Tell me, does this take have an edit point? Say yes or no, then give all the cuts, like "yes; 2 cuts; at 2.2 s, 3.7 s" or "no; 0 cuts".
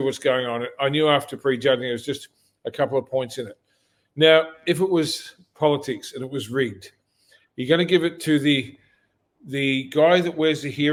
no; 0 cuts